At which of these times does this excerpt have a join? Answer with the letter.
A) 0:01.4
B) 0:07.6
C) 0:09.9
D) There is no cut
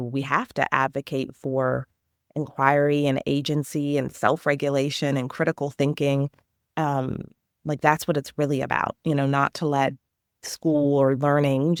D